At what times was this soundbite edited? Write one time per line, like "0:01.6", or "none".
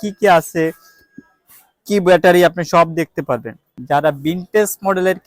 0:03.7

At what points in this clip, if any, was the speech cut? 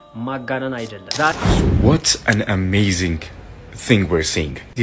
0:01.5

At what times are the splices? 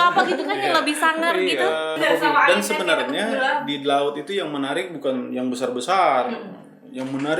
0:01.9

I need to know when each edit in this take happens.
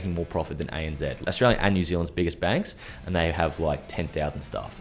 0:01.2

